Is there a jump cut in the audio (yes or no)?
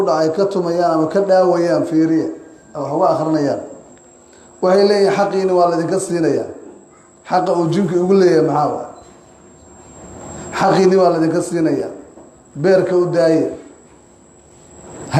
no